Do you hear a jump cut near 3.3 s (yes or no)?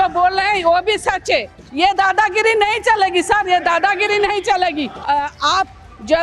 no